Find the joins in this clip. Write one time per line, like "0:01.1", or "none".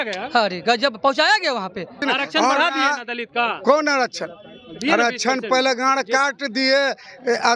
0:02.0